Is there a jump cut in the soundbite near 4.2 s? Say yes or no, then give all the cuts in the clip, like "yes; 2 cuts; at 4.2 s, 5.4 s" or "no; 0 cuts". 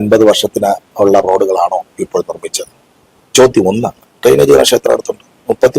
yes; 1 cut; at 4.2 s